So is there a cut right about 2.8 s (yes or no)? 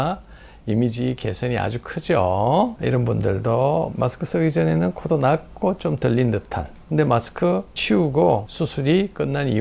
yes